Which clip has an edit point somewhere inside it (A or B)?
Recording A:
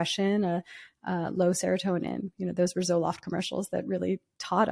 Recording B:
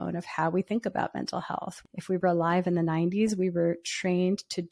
B